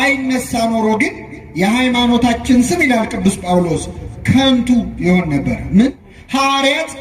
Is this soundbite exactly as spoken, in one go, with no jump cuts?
no; 1 cut; at 6.1 s

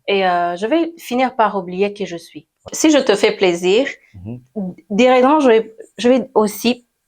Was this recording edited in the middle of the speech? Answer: yes; 1 cut; at 2.7 s

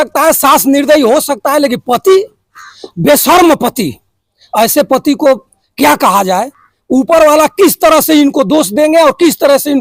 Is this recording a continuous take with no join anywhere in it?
yes; 0 cuts

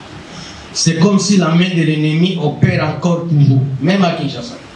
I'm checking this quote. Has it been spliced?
no; 0 cuts

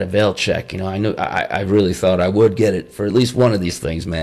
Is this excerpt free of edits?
yes; 0 cuts

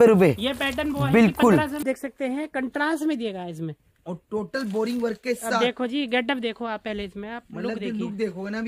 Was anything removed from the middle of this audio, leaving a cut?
yes; 1 cut; at 1.8 s

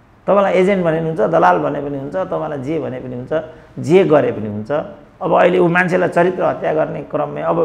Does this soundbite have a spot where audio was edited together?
no; 0 cuts

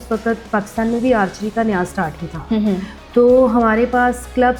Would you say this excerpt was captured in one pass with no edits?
yes; 0 cuts

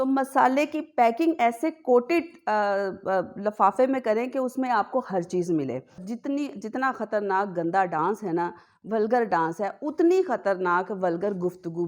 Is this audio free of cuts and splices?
no; 1 cut; at 6.0 s

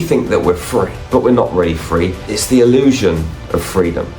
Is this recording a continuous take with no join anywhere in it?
no; 2 cuts; at 1.0 s, 2.3 s

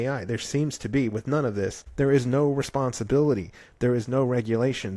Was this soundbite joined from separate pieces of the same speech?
yes; 1 cut; at 1.8 s

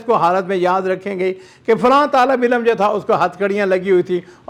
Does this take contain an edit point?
no; 0 cuts

